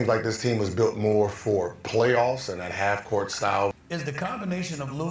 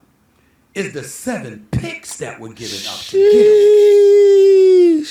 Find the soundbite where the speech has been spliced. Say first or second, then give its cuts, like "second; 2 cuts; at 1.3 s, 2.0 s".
first; 1 cut; at 3.7 s